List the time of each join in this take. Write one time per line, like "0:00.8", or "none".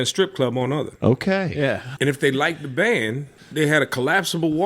0:01.8
0:03.4